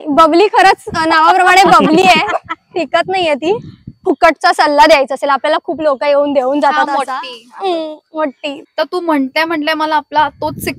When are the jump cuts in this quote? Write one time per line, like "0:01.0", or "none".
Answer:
0:04.0
0:08.6